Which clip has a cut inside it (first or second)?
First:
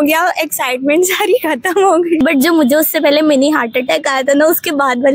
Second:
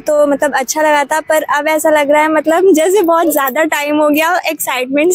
first